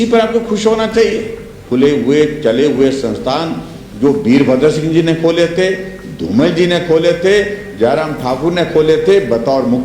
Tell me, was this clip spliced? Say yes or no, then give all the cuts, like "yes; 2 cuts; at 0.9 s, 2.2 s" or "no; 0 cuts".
yes; 1 cut; at 1.6 s